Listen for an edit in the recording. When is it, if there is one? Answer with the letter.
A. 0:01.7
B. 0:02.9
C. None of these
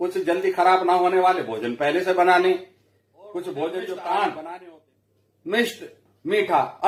C